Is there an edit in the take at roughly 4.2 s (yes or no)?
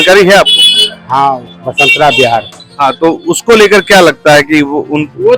no